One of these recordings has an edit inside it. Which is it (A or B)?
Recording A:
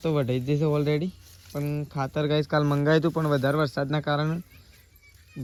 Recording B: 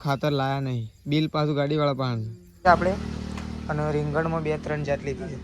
B